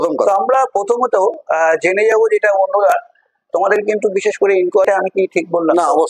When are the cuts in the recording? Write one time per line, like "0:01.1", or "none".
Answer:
0:04.9

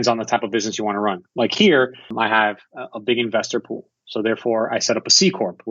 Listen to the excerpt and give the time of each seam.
0:01.2
0:02.1

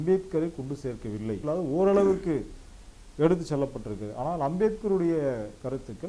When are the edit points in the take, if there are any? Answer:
0:01.4

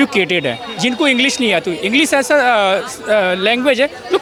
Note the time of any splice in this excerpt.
none

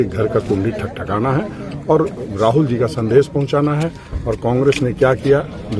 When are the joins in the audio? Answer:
none

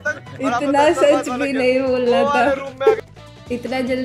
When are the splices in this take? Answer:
0:03.1

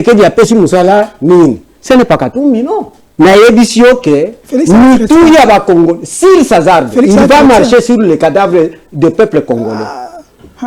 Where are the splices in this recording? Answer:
0:03.0

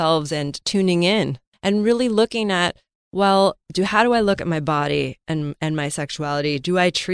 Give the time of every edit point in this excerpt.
0:01.4
0:03.7

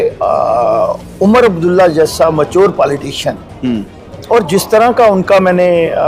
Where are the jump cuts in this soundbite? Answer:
none

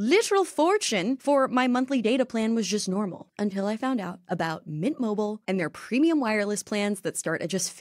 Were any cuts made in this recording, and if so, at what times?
0:01.2
0:03.2

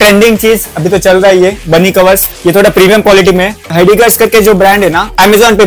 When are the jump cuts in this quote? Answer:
0:02.3
0:03.7

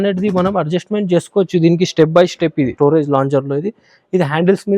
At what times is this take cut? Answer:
0:02.7

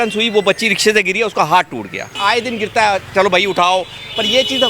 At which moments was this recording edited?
0:02.2

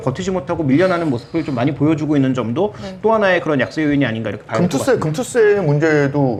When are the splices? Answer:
none

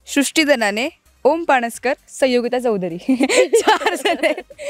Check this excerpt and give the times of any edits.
none

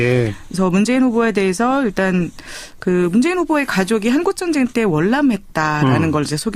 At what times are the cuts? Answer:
0:02.2

